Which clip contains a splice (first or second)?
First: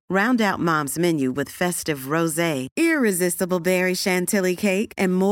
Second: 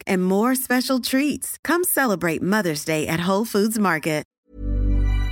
second